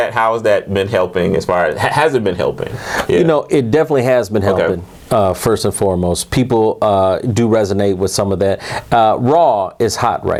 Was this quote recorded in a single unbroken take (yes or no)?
yes